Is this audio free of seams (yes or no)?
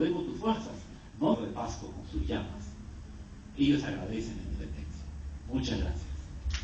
yes